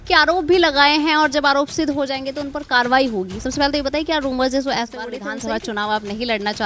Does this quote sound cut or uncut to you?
cut